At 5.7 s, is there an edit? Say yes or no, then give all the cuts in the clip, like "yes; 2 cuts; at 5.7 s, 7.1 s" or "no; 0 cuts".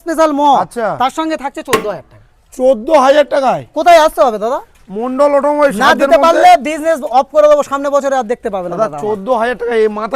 no; 0 cuts